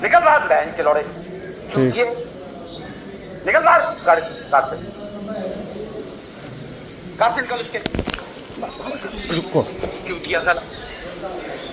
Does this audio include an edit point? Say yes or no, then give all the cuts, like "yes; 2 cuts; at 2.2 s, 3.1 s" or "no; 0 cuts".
no; 0 cuts